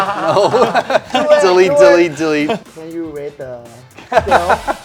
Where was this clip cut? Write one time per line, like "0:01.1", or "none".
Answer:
0:02.7